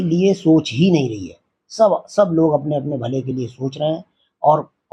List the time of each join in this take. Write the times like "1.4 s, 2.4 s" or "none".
none